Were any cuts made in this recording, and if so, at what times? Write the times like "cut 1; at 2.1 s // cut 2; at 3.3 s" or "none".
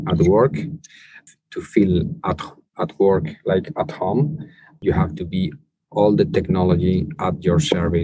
cut 1; at 1.2 s // cut 2; at 4.7 s